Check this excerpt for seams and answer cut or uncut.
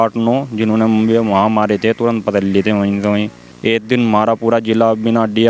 cut